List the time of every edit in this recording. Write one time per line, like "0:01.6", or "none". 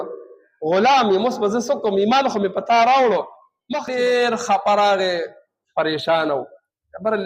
0:03.8